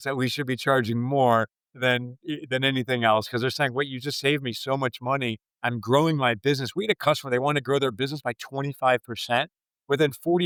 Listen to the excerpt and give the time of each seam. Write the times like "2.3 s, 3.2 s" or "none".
none